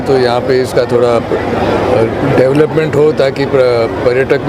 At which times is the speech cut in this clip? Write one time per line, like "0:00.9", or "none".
none

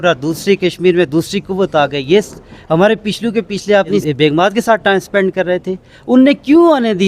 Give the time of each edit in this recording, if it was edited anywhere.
0:04.3

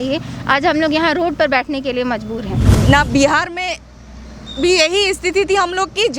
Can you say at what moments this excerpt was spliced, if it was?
0:02.6

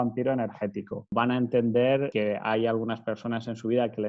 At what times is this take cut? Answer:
0:01.1
0:02.1

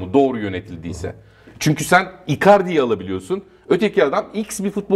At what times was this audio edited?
none

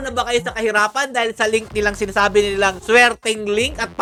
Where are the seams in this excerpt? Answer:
none

